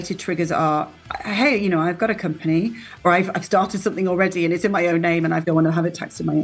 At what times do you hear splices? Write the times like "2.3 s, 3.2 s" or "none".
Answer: 3.0 s, 5.4 s

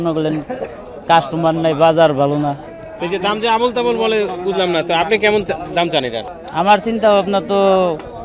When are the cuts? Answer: 2.9 s, 6.2 s

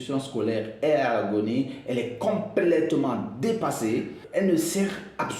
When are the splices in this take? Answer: 4.2 s

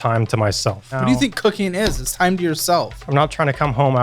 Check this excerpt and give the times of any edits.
0.9 s, 3.0 s

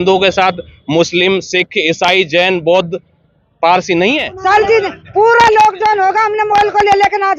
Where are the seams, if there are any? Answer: 4.3 s

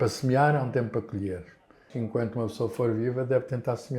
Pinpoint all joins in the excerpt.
1.9 s

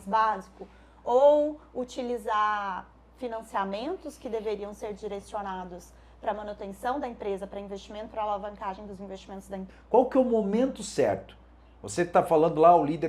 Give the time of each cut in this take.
9.7 s

